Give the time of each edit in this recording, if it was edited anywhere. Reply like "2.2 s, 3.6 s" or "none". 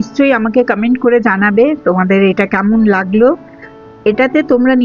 none